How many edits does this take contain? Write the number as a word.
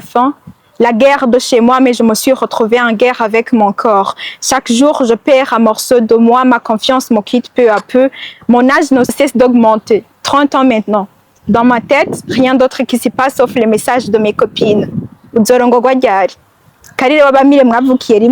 one